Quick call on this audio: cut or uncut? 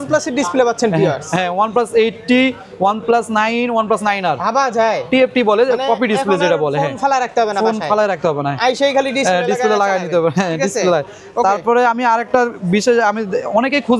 uncut